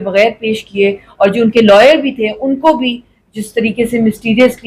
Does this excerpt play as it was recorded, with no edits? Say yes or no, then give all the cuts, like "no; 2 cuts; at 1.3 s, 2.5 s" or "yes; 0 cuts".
yes; 0 cuts